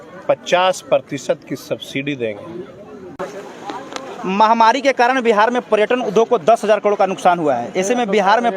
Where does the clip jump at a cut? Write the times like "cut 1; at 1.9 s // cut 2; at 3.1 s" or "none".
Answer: cut 1; at 3.5 s